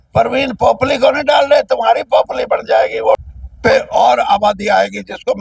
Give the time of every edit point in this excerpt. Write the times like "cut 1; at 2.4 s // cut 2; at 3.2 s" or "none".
cut 1; at 3.4 s